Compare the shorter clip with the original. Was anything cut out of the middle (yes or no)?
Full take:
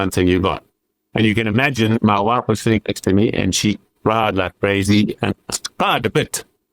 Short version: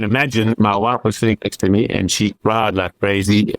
yes